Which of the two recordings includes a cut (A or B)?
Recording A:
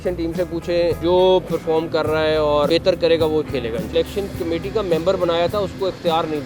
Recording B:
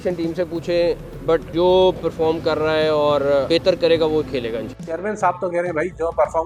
A